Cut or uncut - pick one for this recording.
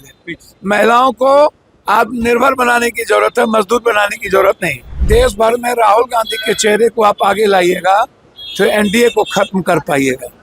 cut